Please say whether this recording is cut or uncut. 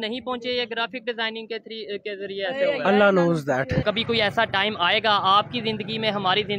cut